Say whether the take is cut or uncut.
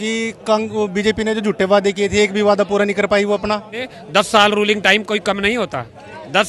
cut